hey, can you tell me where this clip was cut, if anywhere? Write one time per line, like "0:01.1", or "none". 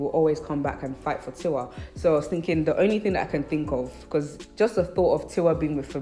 none